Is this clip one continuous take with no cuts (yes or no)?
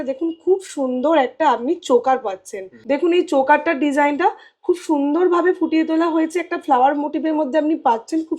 no